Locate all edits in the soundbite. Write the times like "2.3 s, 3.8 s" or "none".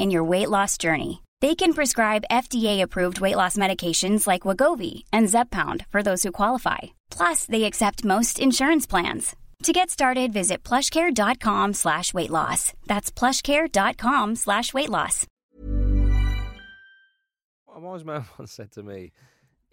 17.8 s